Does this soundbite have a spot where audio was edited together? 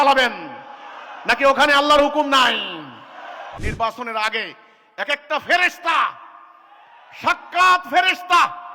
yes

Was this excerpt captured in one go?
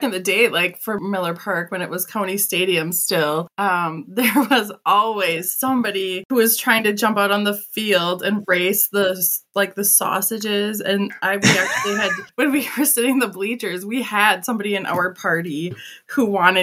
no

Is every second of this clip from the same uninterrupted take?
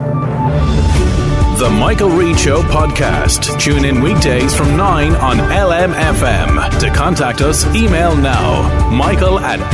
yes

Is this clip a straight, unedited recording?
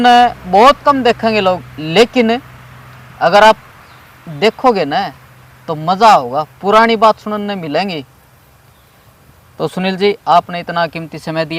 yes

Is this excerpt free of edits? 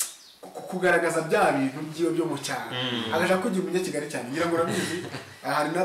yes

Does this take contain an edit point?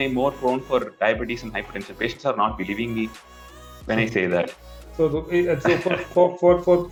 no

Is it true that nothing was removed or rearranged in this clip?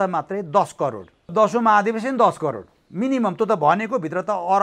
no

